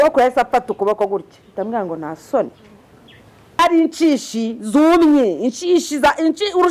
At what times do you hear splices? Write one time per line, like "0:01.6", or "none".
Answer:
0:03.6